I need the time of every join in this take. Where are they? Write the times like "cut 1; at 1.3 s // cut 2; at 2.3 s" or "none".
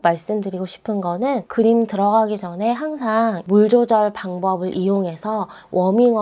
cut 1; at 1.5 s // cut 2; at 3.4 s